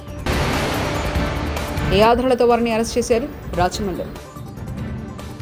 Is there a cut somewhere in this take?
no; 0 cuts

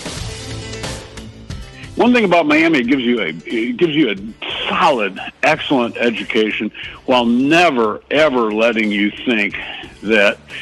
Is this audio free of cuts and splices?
no; 1 cut; at 1.2 s

